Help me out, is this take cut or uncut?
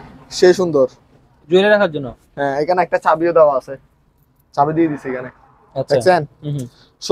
uncut